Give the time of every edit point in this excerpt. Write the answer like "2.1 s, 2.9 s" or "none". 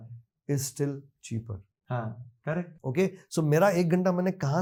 none